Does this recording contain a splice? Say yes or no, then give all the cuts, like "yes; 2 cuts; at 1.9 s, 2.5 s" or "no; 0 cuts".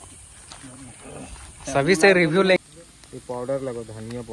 yes; 1 cut; at 2.6 s